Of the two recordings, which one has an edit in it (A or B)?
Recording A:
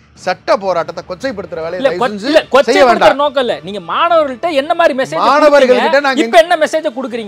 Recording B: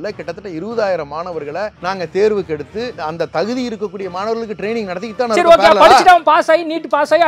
B